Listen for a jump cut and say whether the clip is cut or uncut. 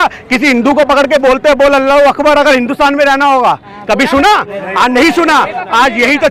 uncut